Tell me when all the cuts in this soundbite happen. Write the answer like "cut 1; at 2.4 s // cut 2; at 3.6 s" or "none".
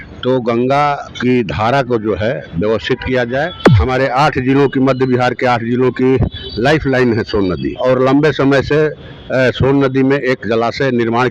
cut 1; at 1.1 s // cut 2; at 3.7 s // cut 3; at 7.7 s